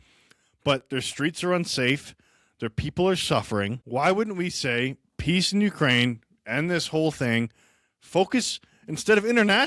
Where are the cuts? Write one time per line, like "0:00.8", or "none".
0:03.8